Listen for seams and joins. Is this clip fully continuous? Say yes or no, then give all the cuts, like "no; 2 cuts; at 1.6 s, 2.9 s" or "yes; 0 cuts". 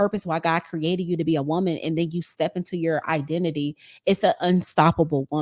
yes; 0 cuts